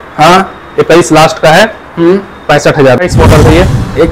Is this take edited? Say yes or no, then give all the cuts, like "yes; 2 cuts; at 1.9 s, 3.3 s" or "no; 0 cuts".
yes; 1 cut; at 3.0 s